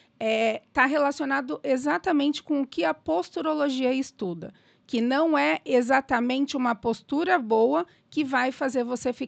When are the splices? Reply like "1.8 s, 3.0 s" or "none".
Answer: none